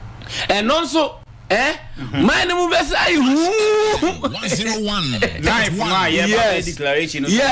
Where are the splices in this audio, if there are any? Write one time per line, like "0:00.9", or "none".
none